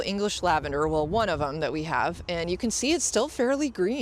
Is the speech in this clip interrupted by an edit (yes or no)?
no